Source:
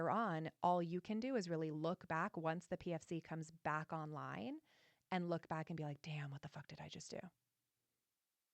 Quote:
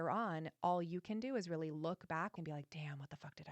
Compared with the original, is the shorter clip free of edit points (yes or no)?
no